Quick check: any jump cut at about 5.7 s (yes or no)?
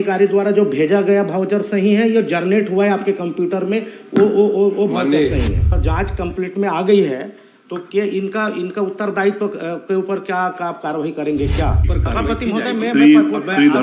yes